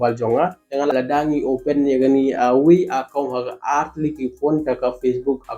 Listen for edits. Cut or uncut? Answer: cut